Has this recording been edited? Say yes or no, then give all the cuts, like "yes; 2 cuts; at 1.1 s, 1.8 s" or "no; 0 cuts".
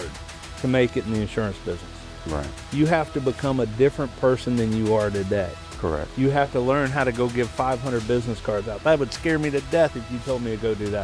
no; 0 cuts